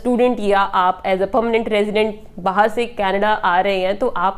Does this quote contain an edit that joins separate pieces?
no; 0 cuts

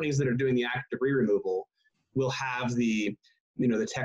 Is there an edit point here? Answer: no; 0 cuts

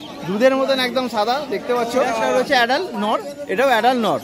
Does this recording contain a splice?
yes; 1 cut; at 2.2 s

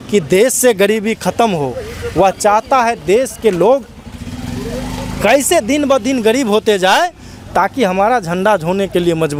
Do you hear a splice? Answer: no; 0 cuts

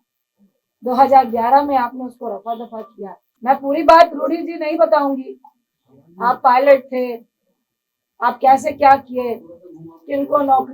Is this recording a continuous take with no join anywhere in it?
no; 1 cut; at 3.2 s

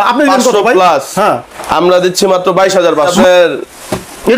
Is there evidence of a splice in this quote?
yes; 1 cut; at 3.1 s

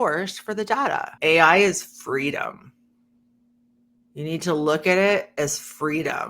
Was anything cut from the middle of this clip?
yes; 1 cut; at 1.1 s

